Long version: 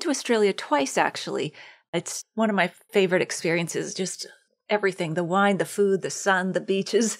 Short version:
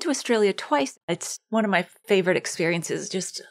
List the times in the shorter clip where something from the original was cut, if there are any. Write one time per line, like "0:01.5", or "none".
0:00.9